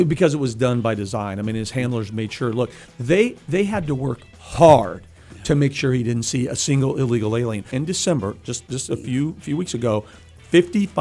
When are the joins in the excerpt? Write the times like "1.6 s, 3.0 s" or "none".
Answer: 2.8 s, 7.7 s